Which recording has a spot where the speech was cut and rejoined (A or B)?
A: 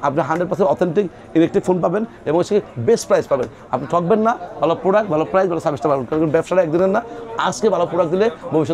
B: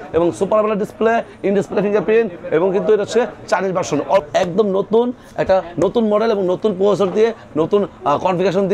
B